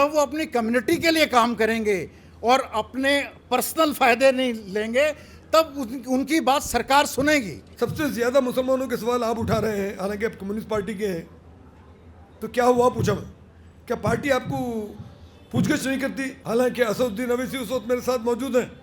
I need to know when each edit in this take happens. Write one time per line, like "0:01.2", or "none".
0:07.6
0:16.3